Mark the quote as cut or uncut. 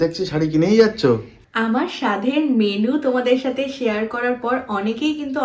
cut